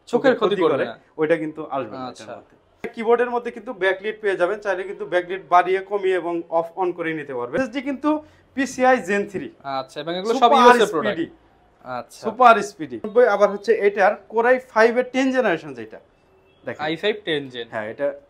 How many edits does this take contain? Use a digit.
3